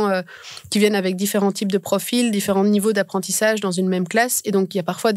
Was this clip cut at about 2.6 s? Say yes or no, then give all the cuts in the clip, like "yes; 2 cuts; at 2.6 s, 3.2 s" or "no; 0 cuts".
no; 0 cuts